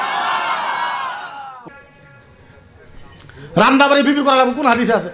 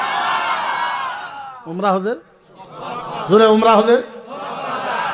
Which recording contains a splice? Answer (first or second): first